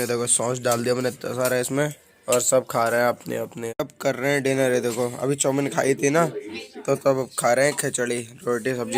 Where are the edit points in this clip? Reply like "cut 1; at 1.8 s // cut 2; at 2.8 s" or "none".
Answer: cut 1; at 3.6 s